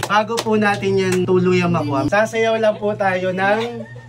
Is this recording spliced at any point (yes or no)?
yes